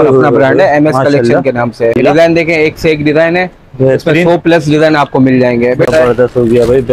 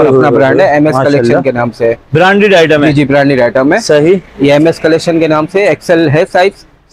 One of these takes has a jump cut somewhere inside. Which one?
first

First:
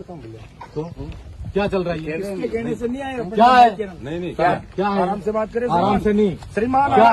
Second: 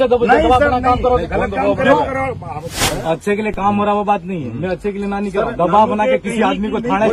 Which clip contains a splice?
second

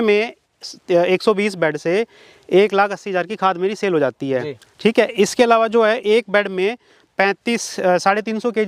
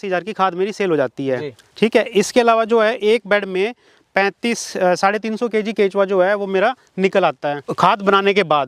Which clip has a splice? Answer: second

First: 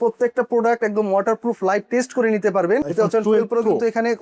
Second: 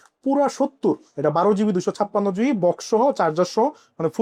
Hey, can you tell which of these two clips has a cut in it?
first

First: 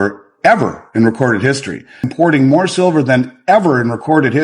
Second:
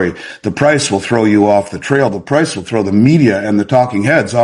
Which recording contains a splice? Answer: first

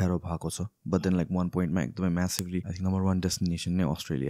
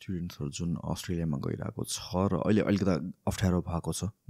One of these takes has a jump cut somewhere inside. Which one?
first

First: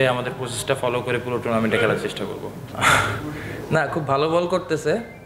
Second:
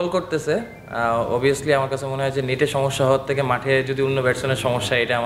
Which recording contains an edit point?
first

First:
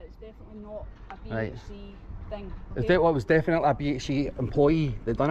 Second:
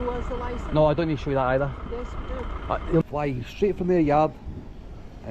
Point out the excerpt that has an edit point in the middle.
second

